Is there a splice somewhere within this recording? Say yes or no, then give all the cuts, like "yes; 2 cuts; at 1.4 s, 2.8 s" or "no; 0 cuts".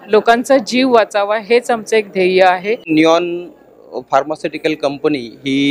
yes; 1 cut; at 2.9 s